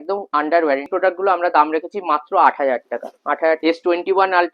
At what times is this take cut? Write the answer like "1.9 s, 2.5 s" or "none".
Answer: 0.9 s, 3.6 s